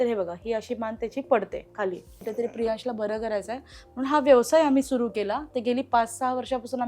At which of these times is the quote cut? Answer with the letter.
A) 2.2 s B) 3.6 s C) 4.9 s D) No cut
A